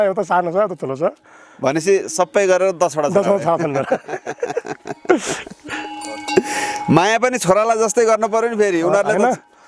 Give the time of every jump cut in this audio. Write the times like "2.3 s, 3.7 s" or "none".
none